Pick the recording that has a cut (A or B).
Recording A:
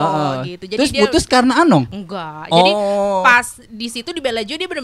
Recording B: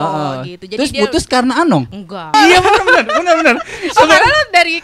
B